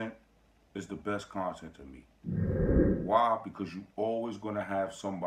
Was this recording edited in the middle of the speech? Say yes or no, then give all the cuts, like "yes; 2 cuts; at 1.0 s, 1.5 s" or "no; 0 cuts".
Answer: yes; 2 cuts; at 1.9 s, 3.0 s